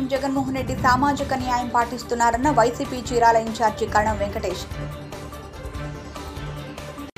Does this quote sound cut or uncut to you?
uncut